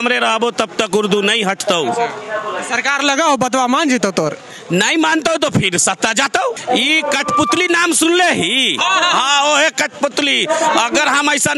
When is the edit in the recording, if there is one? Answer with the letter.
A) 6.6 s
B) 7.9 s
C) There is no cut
A